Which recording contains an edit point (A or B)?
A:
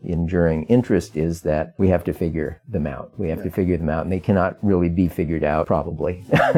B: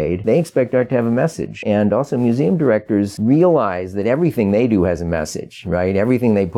A